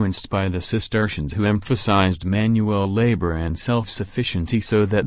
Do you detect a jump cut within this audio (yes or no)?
no